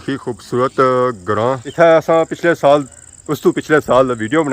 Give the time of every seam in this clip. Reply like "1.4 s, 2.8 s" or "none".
1.6 s